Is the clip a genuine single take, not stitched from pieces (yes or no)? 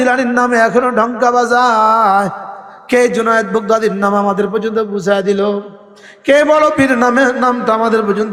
yes